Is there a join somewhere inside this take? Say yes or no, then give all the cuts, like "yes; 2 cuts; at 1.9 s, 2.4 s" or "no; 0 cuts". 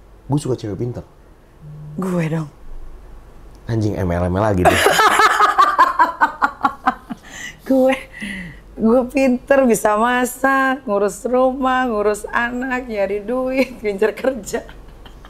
no; 0 cuts